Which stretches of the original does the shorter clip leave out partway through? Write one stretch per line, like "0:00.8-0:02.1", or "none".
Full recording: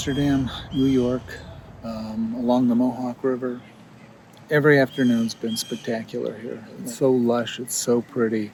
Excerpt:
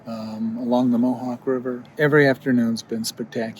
0:03.6-0:04.3